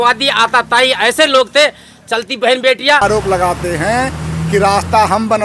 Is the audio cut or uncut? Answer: cut